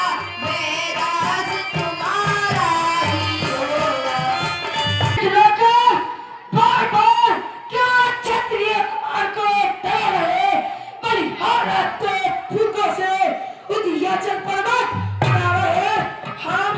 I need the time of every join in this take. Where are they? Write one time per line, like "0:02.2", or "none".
0:05.1